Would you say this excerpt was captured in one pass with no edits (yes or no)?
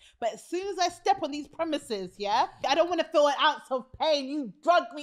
no